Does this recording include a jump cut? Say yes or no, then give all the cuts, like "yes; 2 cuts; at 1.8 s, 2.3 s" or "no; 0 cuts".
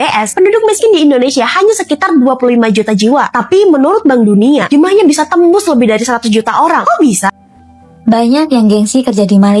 yes; 1 cut; at 7.3 s